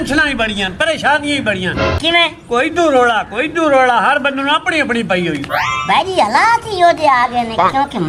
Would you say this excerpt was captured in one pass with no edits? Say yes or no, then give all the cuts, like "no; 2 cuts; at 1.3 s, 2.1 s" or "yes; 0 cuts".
yes; 0 cuts